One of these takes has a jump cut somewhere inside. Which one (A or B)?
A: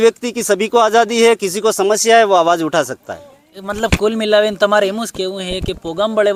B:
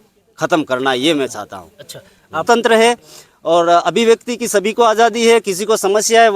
B